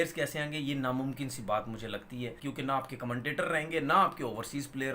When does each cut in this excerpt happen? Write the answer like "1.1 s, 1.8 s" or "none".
2.4 s

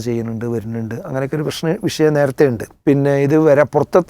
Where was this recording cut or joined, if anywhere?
2.7 s

